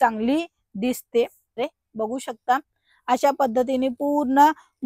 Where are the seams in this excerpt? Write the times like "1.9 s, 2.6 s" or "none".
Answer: 1.6 s